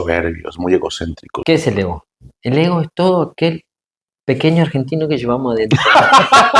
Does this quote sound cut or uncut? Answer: cut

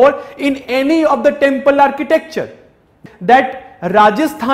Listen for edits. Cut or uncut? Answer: cut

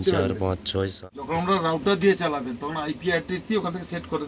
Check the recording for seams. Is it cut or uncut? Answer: cut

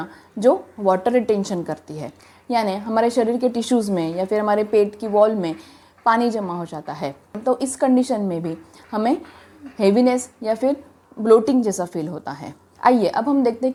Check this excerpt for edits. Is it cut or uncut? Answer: uncut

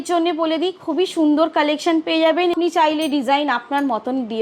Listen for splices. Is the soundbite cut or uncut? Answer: cut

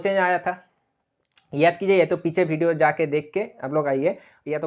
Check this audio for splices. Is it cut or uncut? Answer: uncut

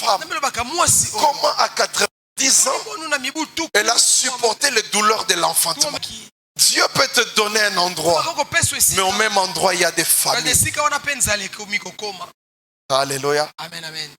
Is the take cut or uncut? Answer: cut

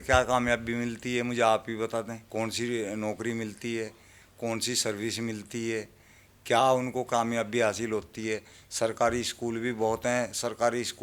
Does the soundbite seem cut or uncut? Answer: cut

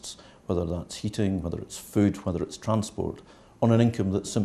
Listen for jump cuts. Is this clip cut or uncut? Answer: uncut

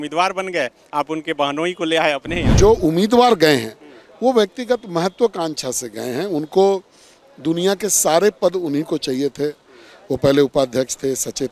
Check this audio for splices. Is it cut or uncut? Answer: cut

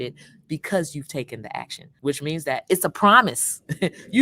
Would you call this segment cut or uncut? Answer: cut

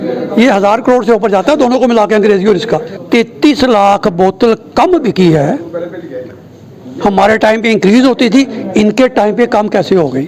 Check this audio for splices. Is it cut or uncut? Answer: cut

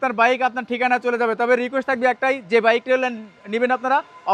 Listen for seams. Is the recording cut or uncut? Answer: uncut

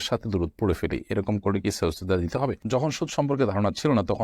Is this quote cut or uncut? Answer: cut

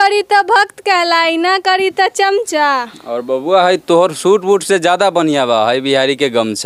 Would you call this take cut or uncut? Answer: uncut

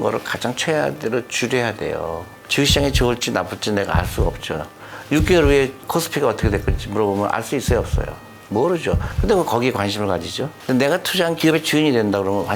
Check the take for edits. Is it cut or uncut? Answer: cut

